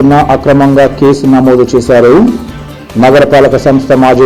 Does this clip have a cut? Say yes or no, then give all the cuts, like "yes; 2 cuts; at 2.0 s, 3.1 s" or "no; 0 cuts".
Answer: no; 0 cuts